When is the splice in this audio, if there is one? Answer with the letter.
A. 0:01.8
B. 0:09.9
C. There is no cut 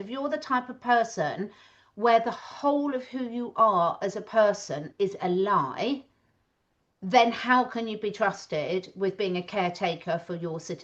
C